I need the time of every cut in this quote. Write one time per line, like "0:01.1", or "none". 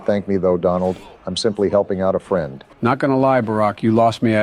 0:02.6